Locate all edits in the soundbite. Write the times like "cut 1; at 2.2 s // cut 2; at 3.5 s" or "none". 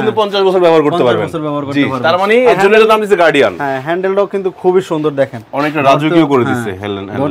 none